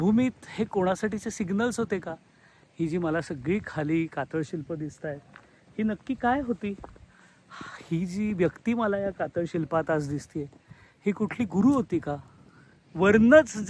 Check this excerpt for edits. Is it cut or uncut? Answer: uncut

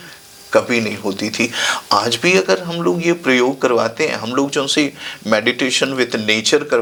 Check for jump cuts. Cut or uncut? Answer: uncut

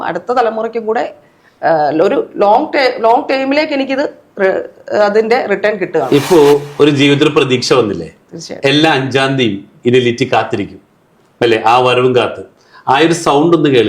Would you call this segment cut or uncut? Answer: uncut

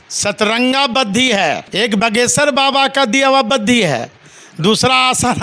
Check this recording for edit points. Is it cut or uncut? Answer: cut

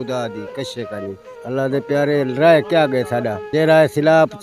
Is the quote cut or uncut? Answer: uncut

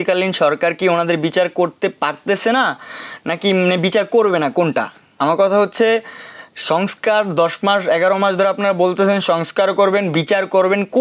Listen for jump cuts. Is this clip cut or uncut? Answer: uncut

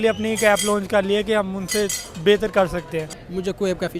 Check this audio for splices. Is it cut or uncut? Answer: cut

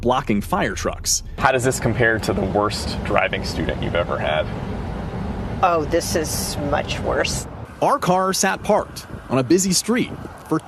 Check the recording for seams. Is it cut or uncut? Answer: cut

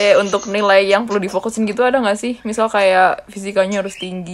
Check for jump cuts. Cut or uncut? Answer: uncut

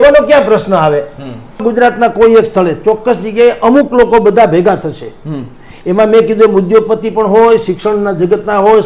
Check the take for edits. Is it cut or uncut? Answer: cut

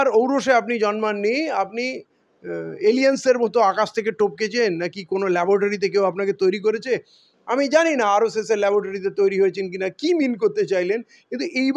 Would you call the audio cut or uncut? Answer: uncut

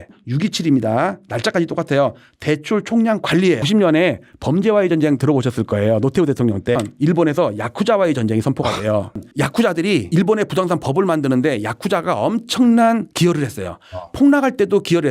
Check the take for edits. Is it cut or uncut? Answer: uncut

